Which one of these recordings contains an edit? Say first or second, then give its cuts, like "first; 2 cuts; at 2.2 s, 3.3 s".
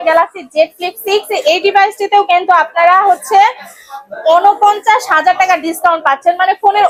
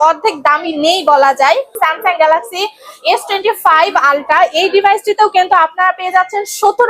second; 1 cut; at 1.7 s